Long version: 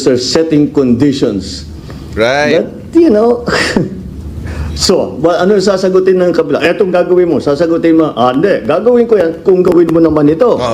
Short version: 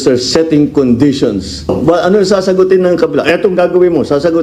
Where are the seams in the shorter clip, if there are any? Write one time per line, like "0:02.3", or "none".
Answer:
0:01.7